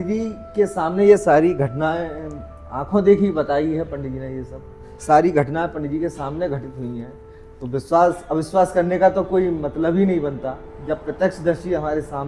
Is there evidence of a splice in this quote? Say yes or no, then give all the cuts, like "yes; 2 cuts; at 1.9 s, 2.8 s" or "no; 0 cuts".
no; 0 cuts